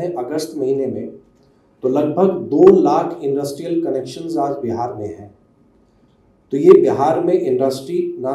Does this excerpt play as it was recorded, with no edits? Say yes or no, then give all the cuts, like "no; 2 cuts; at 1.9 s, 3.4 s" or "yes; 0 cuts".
yes; 0 cuts